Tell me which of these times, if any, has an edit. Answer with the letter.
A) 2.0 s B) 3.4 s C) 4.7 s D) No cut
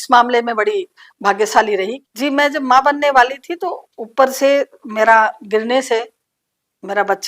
A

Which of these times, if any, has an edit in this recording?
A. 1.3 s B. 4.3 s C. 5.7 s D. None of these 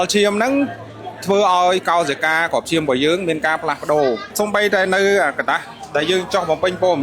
B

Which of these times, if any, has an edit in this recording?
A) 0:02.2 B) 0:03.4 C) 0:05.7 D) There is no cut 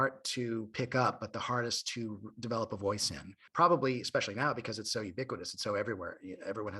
B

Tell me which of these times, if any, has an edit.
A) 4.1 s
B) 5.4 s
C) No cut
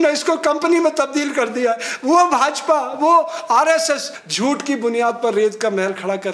A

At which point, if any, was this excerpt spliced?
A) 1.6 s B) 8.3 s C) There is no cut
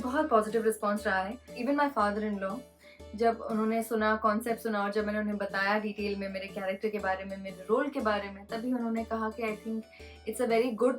A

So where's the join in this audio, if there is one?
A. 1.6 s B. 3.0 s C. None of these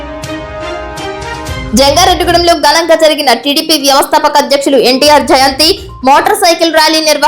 A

